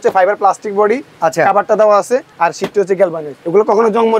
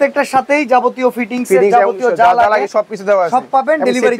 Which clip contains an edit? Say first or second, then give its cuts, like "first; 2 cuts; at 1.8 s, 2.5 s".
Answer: first; 2 cuts; at 2.3 s, 3.3 s